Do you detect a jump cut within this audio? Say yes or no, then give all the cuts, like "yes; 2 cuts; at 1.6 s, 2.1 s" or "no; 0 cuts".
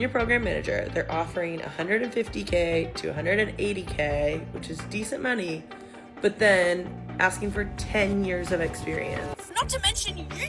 yes; 1 cut; at 9.4 s